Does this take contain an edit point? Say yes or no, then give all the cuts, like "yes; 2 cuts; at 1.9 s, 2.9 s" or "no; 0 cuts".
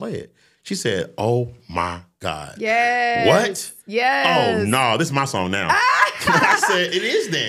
no; 0 cuts